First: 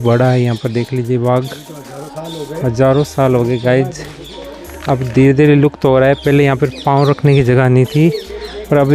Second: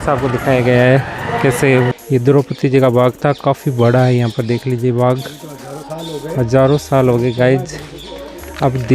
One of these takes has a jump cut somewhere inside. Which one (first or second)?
second